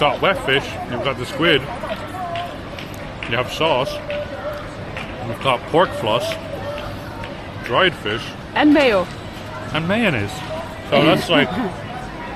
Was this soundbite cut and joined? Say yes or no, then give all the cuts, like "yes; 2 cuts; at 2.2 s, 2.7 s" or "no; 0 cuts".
no; 0 cuts